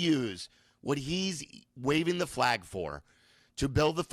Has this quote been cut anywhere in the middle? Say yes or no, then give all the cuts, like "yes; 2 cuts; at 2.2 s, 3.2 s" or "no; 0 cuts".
no; 0 cuts